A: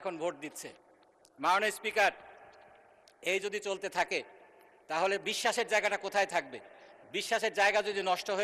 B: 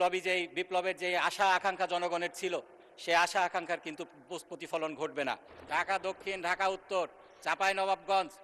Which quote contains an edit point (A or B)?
B